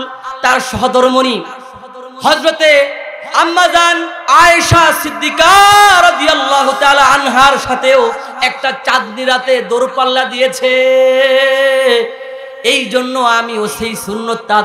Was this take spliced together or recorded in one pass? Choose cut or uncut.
uncut